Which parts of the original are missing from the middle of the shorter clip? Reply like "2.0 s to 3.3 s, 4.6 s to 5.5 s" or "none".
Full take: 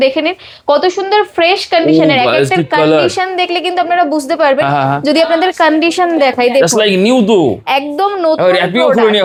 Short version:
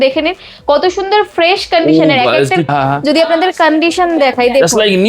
2.7 s to 4.7 s